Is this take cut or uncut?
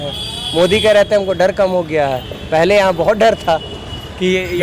uncut